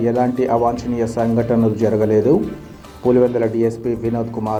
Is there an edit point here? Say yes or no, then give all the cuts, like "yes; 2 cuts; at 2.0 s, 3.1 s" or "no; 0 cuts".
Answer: no; 0 cuts